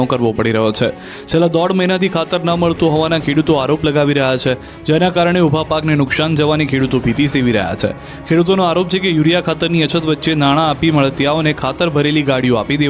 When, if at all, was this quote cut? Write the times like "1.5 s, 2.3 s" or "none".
5.8 s

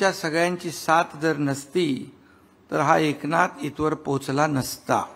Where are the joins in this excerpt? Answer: none

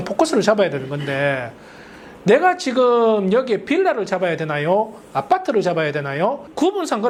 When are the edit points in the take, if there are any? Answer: none

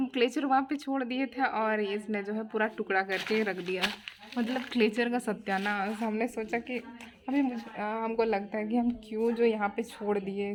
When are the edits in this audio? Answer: none

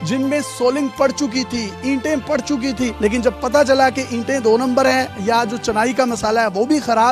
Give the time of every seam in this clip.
none

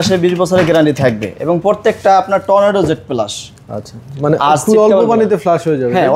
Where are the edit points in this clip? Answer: none

